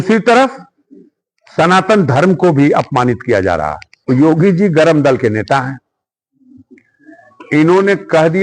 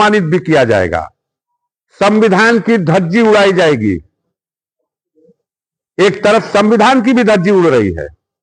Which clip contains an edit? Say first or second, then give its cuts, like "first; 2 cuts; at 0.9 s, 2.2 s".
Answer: first; 1 cut; at 4.0 s